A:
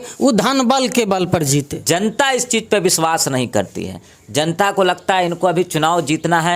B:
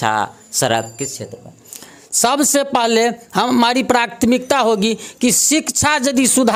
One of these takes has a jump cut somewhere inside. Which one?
A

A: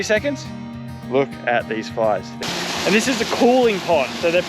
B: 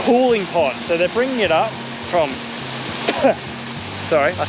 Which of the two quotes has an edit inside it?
A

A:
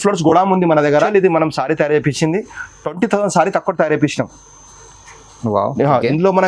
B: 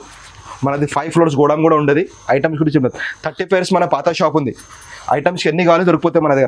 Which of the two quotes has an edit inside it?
A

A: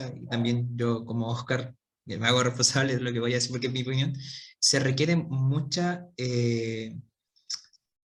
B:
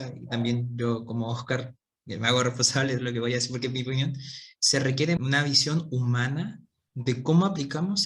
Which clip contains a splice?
B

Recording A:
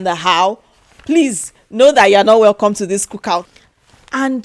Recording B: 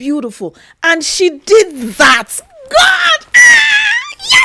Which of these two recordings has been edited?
A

